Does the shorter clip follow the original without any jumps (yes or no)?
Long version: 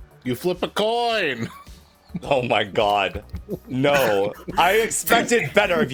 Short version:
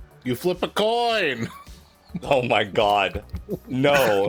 yes